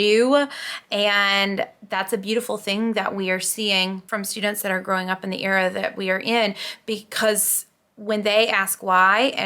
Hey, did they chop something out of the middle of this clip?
yes; 1 cut; at 4.0 s

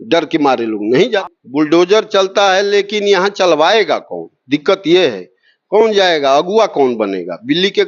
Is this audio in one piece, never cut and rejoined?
no; 1 cut; at 1.3 s

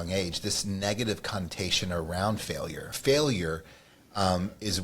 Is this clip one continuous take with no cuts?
no; 1 cut; at 2.9 s

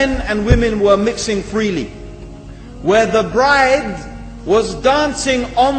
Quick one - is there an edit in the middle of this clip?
no; 0 cuts

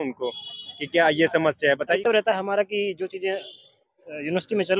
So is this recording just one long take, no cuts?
no; 1 cut; at 2.0 s

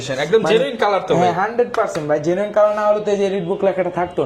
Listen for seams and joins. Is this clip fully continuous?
yes; 0 cuts

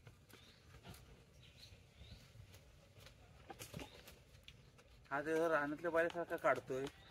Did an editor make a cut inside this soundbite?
no; 0 cuts

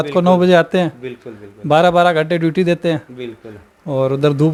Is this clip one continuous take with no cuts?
yes; 0 cuts

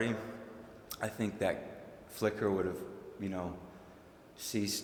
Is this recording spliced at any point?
no; 0 cuts

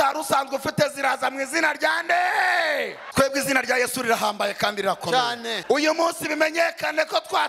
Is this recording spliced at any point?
yes; 2 cuts; at 3.0 s, 5.5 s

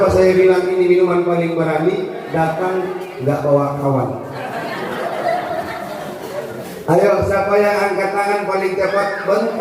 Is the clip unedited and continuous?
no; 1 cut; at 6.7 s

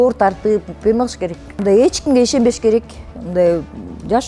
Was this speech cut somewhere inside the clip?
yes; 1 cut; at 1.5 s

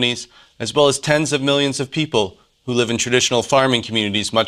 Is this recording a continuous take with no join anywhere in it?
yes; 0 cuts

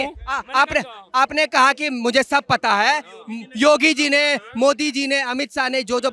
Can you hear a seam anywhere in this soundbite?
no; 0 cuts

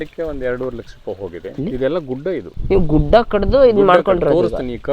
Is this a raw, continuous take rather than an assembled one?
no; 2 cuts; at 1.6 s, 2.5 s

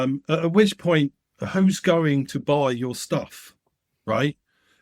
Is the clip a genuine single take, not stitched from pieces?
yes; 0 cuts

